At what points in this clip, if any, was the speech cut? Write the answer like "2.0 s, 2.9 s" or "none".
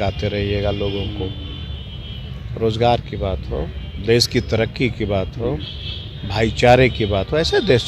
none